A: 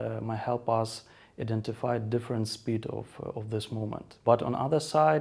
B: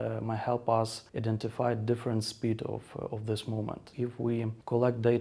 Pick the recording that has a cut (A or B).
B